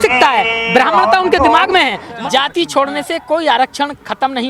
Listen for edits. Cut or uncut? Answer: cut